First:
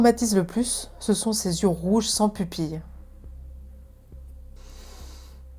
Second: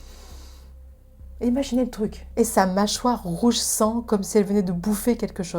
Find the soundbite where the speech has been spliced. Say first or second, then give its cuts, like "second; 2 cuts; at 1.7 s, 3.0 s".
second; 1 cut; at 2.3 s